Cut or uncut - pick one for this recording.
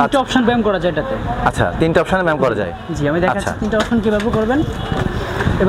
uncut